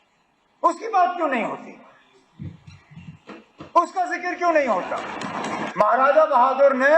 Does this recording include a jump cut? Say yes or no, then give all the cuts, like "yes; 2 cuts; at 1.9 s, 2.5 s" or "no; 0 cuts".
yes; 1 cut; at 5.6 s